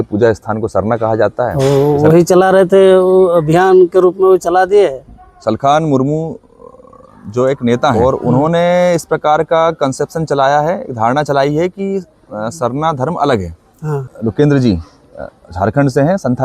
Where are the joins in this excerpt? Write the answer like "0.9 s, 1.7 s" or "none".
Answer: 1.5 s, 7.9 s, 14.1 s